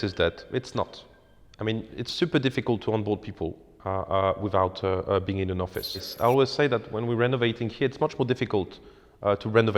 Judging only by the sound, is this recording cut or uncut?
cut